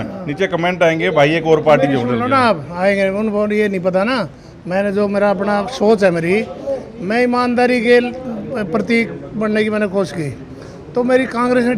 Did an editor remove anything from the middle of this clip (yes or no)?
no